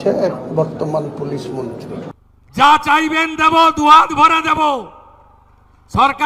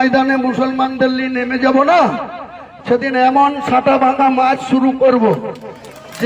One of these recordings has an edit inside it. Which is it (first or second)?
first